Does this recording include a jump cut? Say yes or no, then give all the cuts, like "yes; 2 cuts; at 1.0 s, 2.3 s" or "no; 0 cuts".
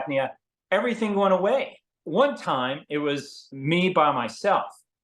yes; 1 cut; at 1.9 s